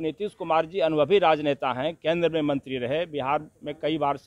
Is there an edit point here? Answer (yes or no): no